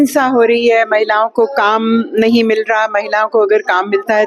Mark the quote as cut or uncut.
uncut